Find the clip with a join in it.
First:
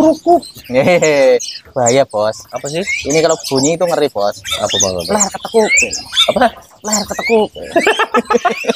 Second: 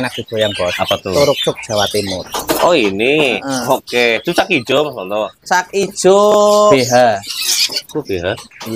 second; 2 cuts; at 2.2 s, 6.7 s

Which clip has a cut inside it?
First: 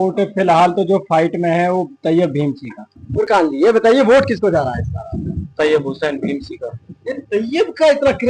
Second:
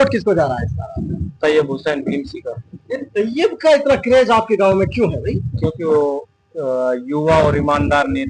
first; 1 cut; at 2.9 s

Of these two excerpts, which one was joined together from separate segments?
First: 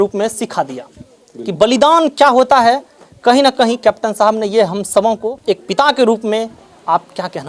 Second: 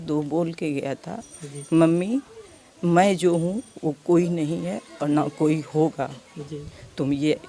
first; 1 cut; at 5.3 s

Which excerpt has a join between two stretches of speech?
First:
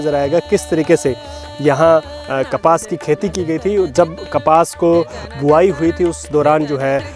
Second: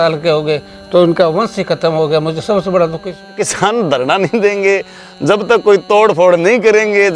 second; 1 cut; at 3.3 s

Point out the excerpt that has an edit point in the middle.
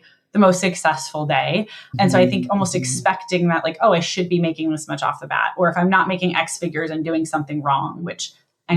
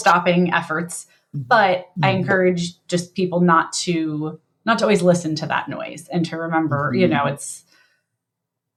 first; 1 cut; at 1.9 s

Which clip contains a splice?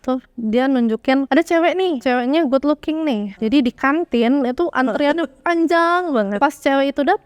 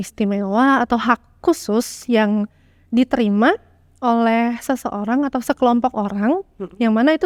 first; 4 cuts; at 1.3 s, 2.0 s, 3.3 s, 6.3 s

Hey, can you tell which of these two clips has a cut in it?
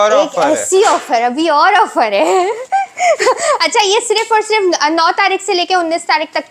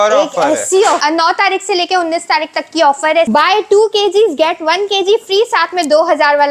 second; 2 cuts; at 1.0 s, 3.3 s

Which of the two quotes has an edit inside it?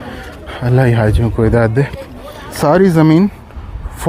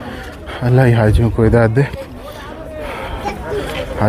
first; 1 cut; at 2.6 s

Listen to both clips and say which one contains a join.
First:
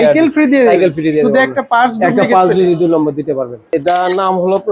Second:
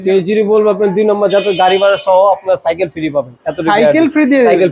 first; 1 cut; at 3.6 s

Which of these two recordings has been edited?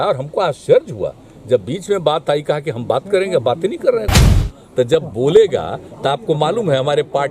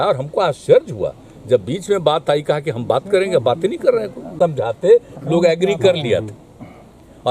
first; 1 cut; at 4.2 s

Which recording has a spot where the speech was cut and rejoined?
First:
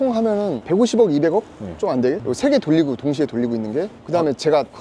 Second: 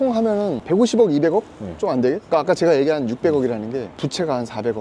first; 2 cuts; at 2.2 s, 4.0 s

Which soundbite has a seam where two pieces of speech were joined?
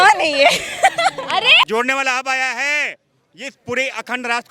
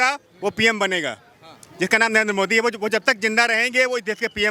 first; 1 cut; at 1.7 s

